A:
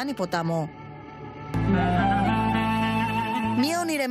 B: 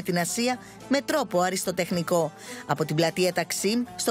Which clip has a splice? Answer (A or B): A